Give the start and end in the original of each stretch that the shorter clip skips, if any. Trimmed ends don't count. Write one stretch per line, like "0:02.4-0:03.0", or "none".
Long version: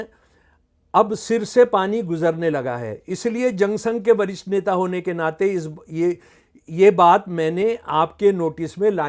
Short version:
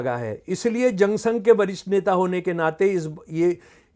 none